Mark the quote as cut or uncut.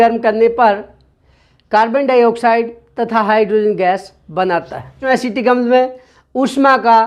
cut